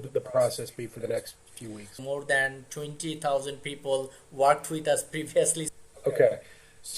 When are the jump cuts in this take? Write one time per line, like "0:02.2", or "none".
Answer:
0:02.0
0:05.7

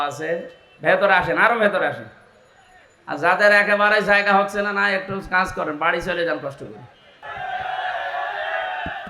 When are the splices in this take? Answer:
0:07.2

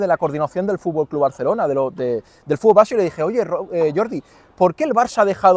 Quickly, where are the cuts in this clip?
none

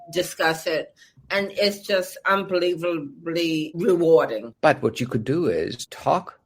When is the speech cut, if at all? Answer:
0:04.4

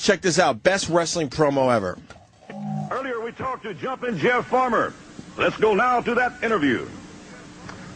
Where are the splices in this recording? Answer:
0:05.7

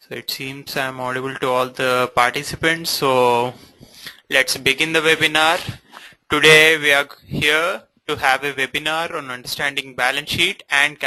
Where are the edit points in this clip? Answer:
none

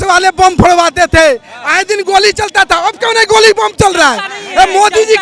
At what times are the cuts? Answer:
none

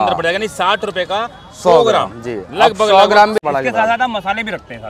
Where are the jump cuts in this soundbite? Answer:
0:03.4

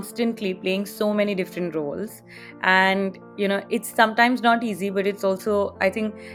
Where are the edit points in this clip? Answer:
none

